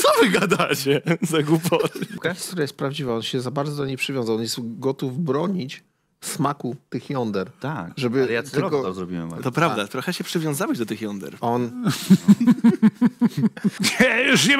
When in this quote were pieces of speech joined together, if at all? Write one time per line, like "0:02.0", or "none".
0:02.2
0:13.8